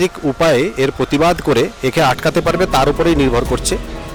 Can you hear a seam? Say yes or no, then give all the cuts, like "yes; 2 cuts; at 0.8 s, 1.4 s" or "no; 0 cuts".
no; 0 cuts